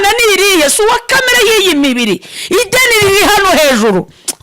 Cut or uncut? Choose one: uncut